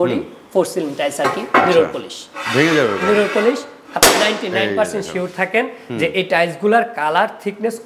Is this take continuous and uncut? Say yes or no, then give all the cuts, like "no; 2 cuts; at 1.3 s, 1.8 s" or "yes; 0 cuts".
yes; 0 cuts